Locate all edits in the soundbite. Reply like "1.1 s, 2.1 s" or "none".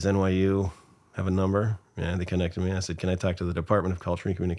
none